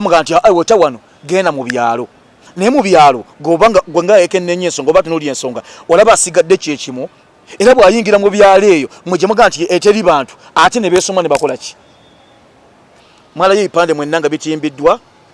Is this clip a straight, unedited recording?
no; 1 cut; at 13.1 s

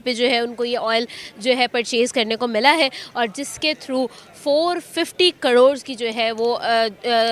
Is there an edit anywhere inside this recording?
no; 0 cuts

